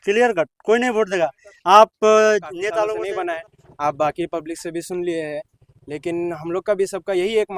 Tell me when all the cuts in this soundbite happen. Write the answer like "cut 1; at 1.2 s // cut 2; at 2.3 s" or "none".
cut 1; at 3.0 s